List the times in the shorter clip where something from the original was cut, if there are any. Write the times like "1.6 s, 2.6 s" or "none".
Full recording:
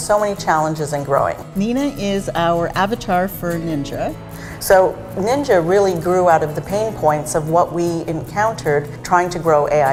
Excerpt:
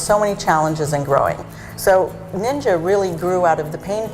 1.4 s